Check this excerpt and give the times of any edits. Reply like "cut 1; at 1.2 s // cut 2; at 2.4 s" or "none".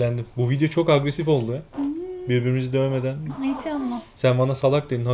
none